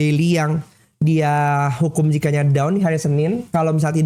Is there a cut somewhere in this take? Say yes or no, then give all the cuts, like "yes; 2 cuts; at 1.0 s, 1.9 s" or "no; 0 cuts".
no; 0 cuts